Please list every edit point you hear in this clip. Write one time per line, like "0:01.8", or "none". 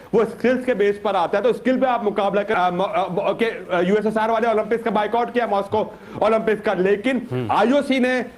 0:02.5